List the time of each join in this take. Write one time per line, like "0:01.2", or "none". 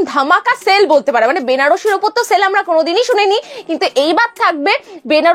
none